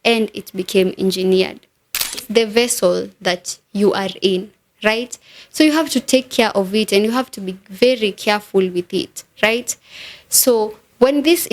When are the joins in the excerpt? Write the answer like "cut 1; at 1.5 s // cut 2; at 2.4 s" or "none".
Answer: cut 1; at 2.2 s